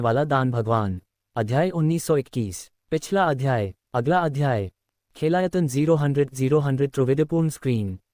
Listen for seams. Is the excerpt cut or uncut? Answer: cut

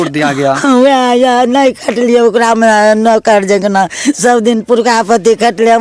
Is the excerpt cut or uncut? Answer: uncut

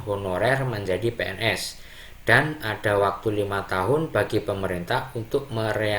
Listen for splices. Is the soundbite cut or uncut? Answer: uncut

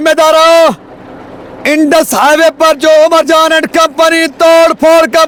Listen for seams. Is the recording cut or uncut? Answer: uncut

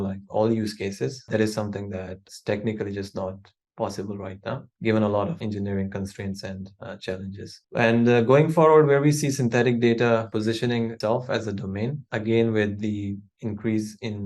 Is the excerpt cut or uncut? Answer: cut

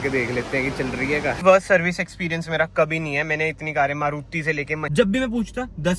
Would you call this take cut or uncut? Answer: cut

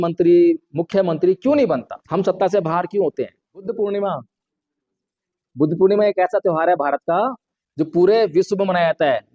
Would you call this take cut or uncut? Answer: cut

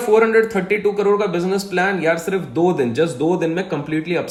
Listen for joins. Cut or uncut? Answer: uncut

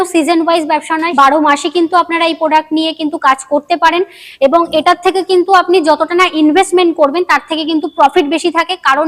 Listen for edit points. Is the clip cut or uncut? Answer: cut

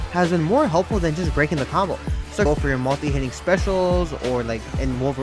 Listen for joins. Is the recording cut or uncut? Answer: cut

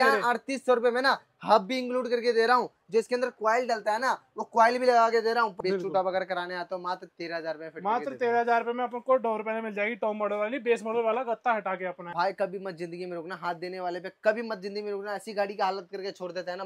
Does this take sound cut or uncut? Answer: cut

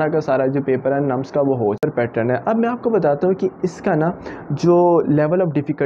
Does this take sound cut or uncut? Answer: cut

